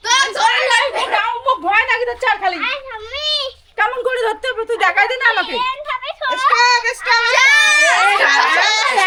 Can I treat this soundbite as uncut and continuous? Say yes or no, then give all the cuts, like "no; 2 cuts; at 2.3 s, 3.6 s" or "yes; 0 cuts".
yes; 0 cuts